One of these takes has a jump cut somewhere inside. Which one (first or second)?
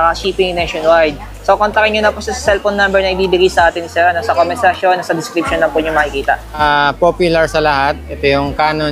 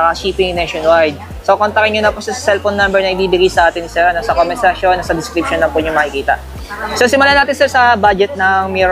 first